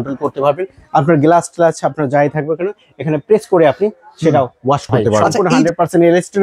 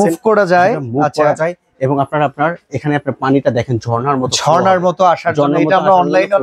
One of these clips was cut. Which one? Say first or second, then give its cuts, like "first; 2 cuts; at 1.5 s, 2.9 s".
first; 1 cut; at 5.4 s